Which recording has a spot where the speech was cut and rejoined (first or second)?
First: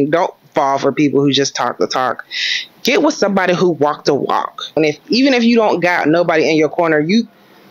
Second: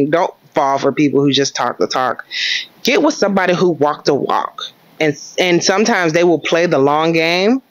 first